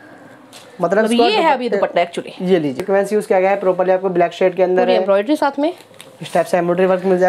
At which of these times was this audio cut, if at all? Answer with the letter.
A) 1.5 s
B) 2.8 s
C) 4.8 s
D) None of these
B